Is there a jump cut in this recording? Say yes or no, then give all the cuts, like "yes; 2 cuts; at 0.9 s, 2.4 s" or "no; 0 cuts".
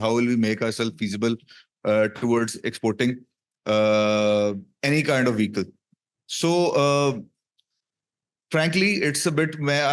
no; 0 cuts